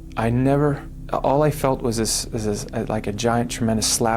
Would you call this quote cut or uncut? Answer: cut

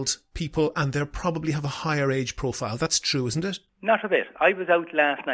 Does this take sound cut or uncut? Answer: cut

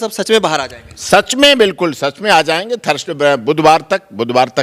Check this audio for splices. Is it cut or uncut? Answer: uncut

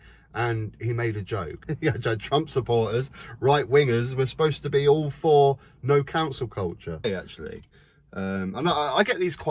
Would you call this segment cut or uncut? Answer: cut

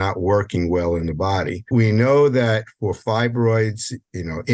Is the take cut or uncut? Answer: cut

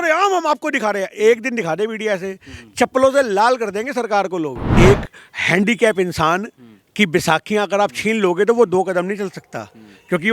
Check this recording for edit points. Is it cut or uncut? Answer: cut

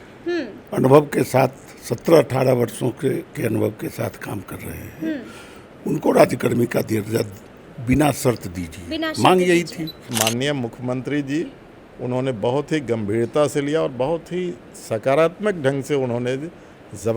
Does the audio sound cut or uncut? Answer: cut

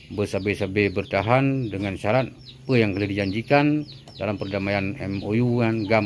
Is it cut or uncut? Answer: uncut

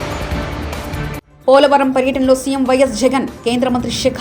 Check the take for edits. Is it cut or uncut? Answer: cut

